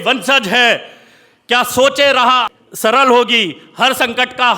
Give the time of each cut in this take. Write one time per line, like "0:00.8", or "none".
0:02.5